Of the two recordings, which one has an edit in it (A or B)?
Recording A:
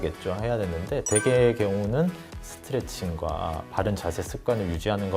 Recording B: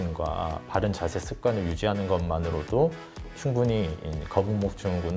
B